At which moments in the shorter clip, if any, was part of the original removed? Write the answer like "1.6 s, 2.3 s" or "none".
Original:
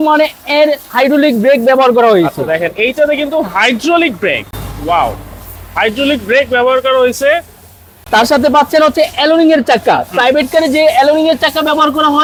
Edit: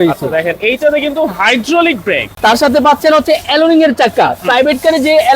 2.3 s